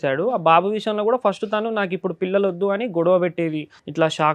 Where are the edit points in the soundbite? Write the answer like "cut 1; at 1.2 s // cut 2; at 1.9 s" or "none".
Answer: none